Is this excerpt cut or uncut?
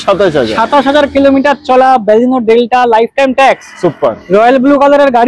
uncut